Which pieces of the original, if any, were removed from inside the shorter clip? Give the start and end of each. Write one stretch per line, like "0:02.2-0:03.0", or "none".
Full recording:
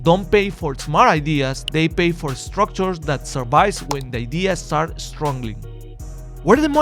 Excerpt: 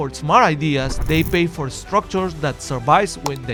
none